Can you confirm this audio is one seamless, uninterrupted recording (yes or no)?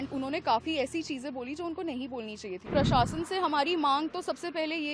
no